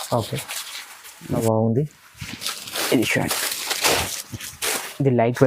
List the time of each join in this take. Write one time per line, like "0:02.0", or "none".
0:01.4